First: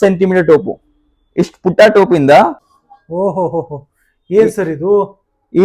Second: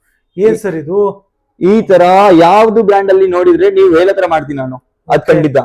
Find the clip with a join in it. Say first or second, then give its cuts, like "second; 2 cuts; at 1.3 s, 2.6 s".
first; 1 cut; at 2.7 s